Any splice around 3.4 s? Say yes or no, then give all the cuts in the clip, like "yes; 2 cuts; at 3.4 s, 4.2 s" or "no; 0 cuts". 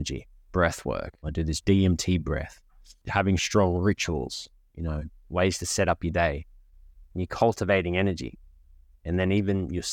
yes; 2 cuts; at 1.6 s, 3.4 s